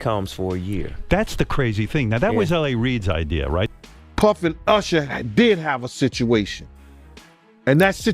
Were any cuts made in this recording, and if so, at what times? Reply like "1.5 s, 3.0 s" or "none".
3.7 s